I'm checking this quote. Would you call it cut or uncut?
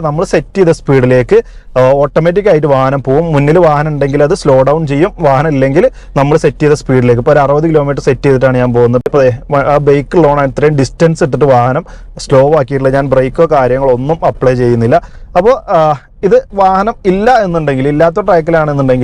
uncut